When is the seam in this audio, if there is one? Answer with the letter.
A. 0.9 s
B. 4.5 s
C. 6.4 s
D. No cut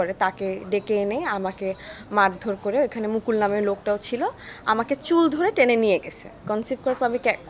C